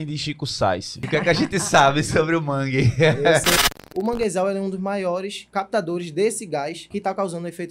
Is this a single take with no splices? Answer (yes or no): no